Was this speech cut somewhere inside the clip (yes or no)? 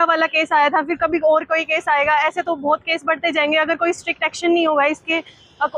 no